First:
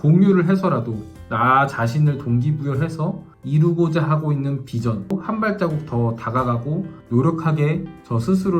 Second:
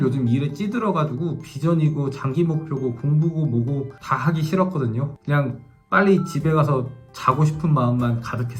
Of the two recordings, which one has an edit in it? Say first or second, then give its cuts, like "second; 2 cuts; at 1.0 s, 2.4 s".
first; 2 cuts; at 3.3 s, 5.1 s